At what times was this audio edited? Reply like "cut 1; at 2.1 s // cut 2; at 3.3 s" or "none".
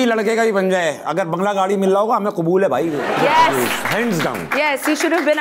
cut 1; at 3.2 s